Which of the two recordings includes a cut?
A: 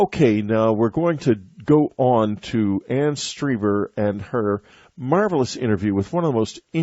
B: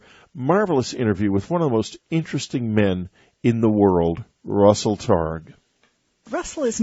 A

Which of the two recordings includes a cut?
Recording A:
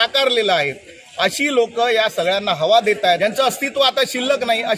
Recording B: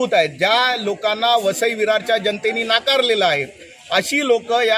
A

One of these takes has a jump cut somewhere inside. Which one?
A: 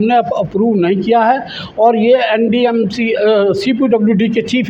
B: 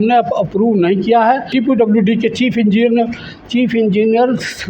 B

